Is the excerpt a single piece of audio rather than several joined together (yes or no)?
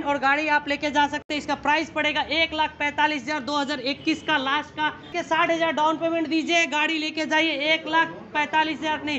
yes